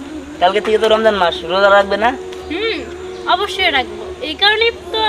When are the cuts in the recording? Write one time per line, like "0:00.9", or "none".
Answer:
none